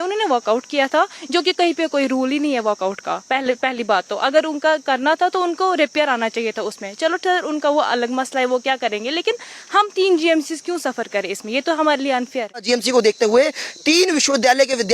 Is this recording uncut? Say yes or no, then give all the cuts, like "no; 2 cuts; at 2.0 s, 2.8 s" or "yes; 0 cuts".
no; 1 cut; at 12.6 s